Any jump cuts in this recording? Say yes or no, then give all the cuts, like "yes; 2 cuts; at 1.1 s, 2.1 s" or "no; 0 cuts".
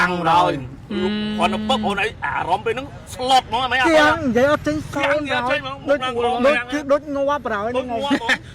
no; 0 cuts